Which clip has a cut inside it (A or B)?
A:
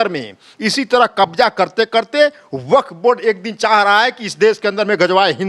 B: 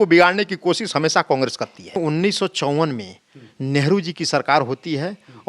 B